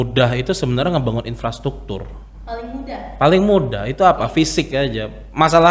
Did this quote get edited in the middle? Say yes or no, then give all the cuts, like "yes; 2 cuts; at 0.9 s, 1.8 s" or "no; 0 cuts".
no; 0 cuts